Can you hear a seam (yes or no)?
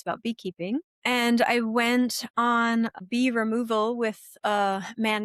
yes